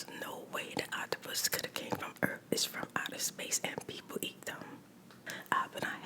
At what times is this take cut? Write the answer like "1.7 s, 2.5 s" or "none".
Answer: 5.2 s